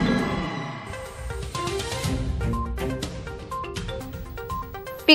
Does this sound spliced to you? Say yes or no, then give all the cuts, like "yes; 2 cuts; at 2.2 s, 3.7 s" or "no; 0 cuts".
no; 0 cuts